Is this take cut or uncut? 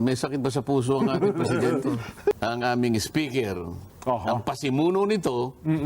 cut